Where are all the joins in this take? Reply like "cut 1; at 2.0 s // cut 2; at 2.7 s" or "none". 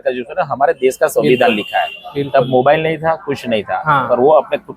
none

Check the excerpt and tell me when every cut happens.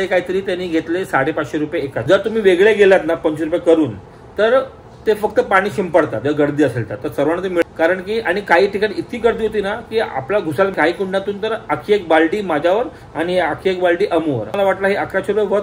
cut 1; at 2.0 s // cut 2; at 7.6 s // cut 3; at 10.7 s // cut 4; at 14.5 s

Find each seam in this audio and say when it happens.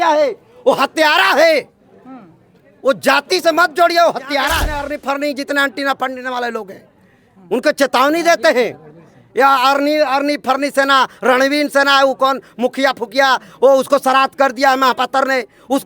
cut 1; at 4.9 s

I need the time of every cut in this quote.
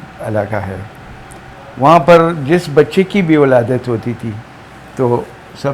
none

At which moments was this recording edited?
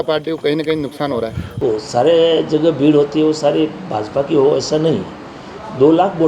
cut 1; at 1.6 s

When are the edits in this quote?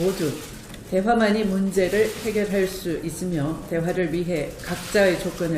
cut 1; at 2.4 s

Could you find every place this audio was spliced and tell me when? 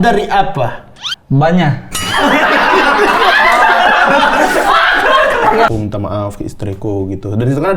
cut 1; at 5.7 s

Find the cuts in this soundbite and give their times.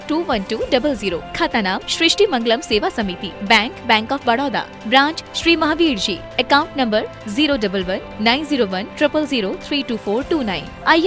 none

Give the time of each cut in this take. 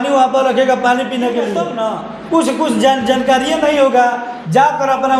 cut 1; at 1.7 s

